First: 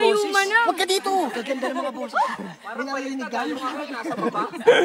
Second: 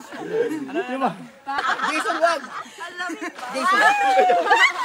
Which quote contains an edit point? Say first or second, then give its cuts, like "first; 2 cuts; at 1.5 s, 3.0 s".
second; 1 cut; at 1.6 s